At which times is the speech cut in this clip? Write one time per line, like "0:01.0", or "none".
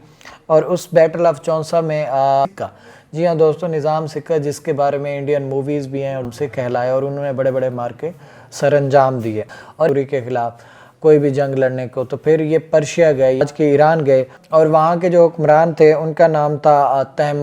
0:02.5
0:06.3
0:09.9
0:13.4